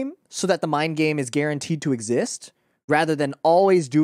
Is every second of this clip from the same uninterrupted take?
yes; 0 cuts

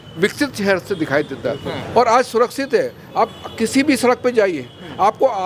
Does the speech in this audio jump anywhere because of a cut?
yes; 1 cut; at 1.8 s

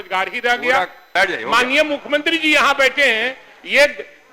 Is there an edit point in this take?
yes; 1 cut; at 1.1 s

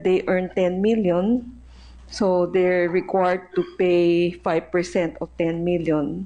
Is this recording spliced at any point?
no; 0 cuts

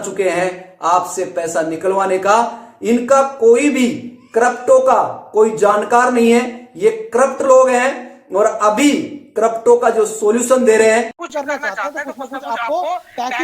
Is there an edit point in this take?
yes; 1 cut; at 11.2 s

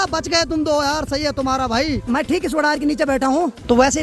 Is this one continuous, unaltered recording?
yes; 0 cuts

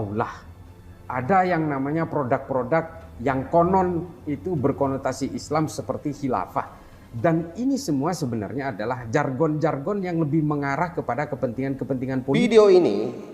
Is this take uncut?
no; 1 cut; at 12.3 s

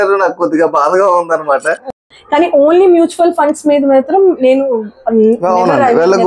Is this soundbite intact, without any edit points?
no; 1 cut; at 1.8 s

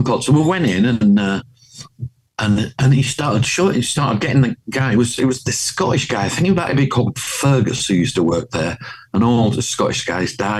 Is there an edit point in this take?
no; 0 cuts

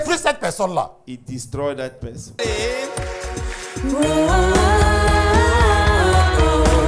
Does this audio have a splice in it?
no; 0 cuts

